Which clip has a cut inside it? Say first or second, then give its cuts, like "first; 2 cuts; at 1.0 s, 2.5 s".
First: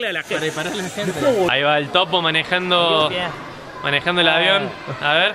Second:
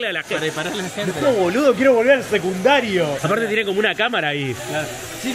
first; 1 cut; at 1.5 s